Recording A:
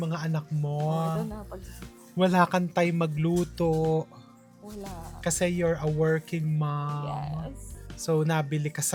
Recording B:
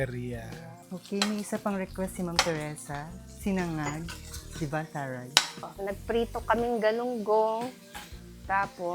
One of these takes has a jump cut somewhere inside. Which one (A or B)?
B